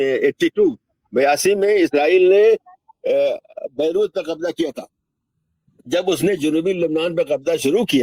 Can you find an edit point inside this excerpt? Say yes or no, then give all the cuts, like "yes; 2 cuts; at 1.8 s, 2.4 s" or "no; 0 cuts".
no; 0 cuts